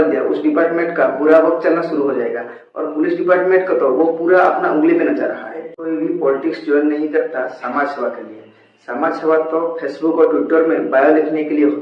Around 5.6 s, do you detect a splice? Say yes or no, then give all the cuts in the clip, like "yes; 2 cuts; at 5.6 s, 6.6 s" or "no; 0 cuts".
yes; 1 cut; at 5.6 s